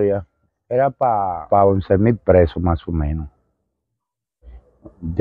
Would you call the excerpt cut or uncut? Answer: cut